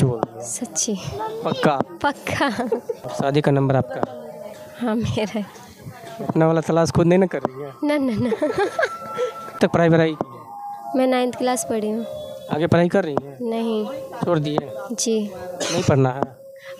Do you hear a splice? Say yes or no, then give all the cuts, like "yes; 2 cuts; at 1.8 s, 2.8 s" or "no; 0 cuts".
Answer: yes; 2 cuts; at 3.0 s, 9.6 s